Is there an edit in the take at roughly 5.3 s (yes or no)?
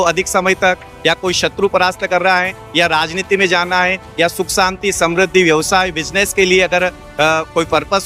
no